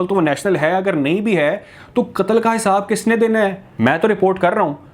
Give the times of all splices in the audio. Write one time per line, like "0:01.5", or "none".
0:03.6

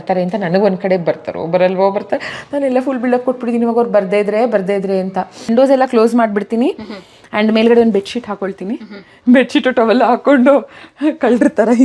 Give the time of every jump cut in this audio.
0:05.4

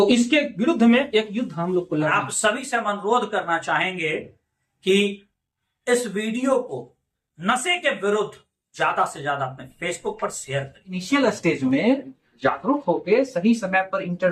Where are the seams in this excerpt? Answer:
0:02.1
0:10.9

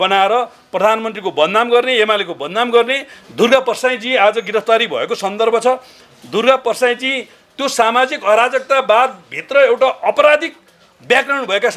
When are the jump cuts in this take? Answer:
0:03.2

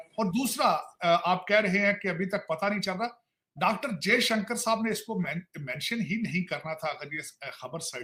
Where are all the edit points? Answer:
none

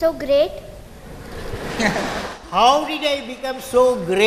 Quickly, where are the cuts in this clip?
none

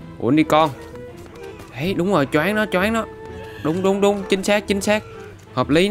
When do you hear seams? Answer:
none

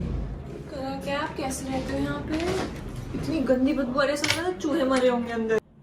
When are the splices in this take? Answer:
none

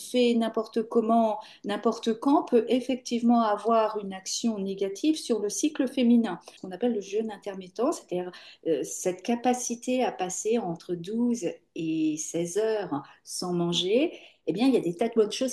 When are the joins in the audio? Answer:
0:06.6

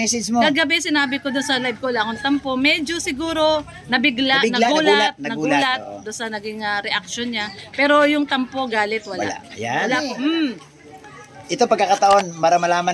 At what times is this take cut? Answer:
0:10.0

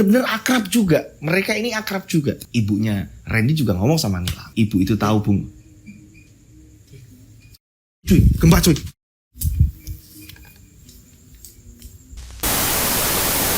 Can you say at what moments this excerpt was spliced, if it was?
0:12.2

